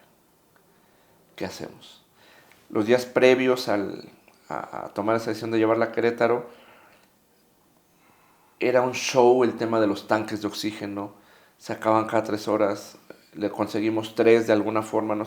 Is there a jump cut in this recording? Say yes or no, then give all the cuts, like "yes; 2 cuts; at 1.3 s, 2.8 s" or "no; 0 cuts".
no; 0 cuts